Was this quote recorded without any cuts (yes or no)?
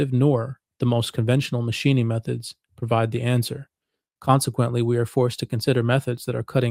yes